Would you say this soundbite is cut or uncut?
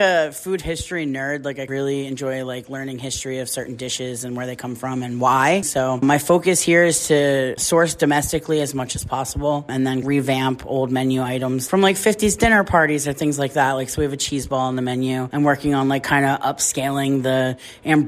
cut